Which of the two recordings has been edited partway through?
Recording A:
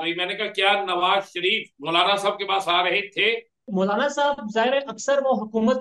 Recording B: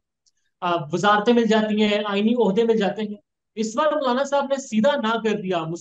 A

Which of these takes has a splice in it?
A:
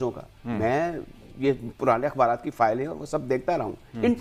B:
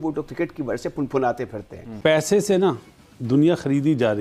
B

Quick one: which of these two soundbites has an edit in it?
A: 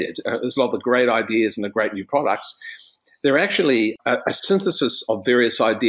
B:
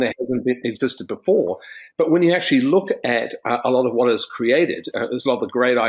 A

